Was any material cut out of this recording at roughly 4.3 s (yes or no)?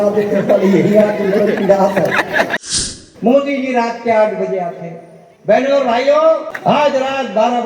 no